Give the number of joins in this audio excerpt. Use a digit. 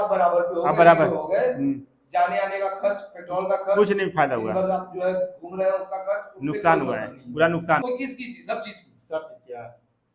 1